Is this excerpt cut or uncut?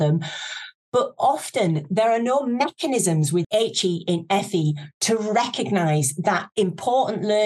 cut